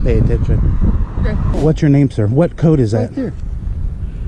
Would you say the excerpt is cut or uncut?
cut